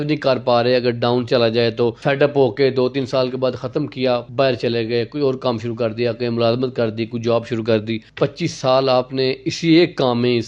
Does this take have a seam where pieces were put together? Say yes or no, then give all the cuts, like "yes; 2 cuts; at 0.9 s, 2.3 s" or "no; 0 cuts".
no; 0 cuts